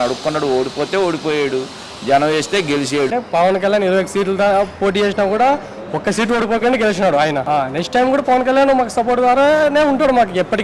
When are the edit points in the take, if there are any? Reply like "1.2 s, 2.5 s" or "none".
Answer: 3.1 s, 7.4 s